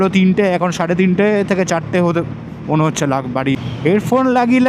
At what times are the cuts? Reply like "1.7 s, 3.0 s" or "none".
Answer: 3.5 s